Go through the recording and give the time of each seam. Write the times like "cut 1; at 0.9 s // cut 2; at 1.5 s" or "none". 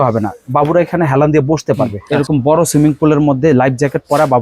cut 1; at 2.0 s